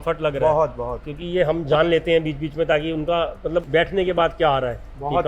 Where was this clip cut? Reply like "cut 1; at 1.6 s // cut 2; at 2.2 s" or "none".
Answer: none